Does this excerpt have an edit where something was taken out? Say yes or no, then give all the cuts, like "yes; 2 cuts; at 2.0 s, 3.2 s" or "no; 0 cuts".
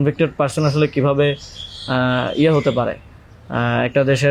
no; 0 cuts